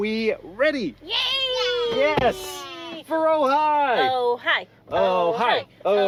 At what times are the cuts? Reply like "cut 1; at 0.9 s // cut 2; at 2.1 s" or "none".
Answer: none